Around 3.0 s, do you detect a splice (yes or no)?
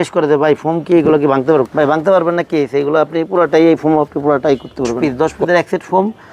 no